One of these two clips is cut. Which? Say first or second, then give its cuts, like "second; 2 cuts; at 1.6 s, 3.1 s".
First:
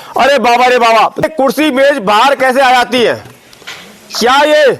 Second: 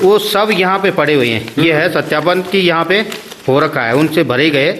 first; 1 cut; at 1.2 s